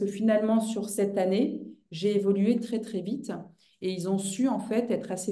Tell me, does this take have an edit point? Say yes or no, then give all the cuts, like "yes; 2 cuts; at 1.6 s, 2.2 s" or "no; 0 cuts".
no; 0 cuts